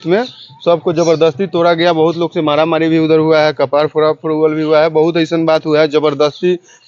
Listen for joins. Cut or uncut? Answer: uncut